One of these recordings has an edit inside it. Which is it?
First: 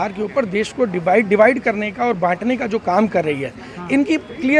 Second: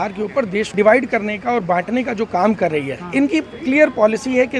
second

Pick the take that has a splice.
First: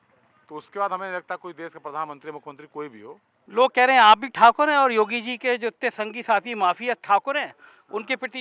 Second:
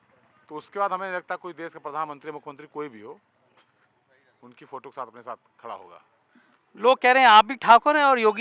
first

